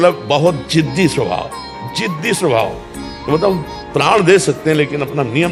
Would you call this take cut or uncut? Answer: uncut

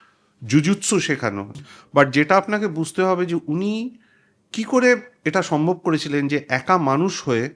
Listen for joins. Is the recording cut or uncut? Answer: cut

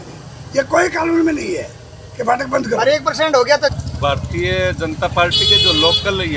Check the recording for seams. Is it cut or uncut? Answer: cut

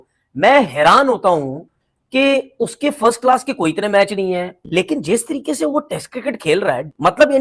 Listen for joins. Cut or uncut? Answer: uncut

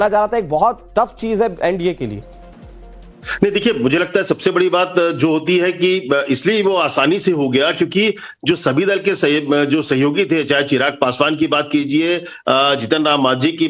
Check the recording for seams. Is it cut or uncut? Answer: uncut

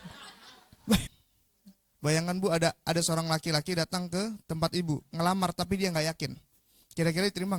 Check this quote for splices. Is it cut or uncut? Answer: cut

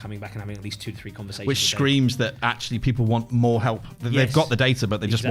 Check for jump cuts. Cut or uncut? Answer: uncut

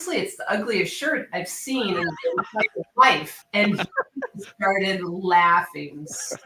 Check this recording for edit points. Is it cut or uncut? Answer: uncut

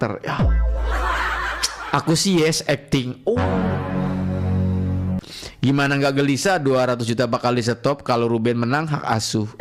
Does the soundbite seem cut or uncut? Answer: uncut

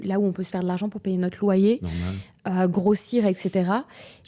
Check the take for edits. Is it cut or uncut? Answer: uncut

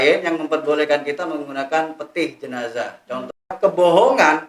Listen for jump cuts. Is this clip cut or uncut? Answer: cut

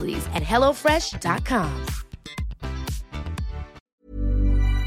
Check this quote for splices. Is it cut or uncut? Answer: cut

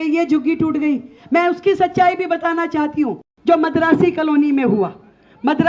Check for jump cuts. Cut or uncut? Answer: cut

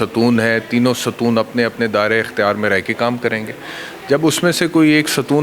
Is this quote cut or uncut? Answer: uncut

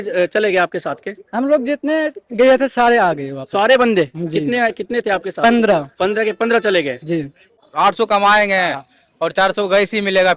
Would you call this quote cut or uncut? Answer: cut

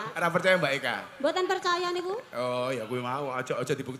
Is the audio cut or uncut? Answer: uncut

